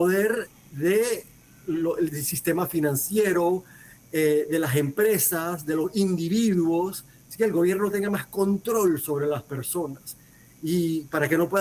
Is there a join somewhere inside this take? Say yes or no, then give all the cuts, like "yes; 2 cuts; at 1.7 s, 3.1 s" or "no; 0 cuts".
no; 0 cuts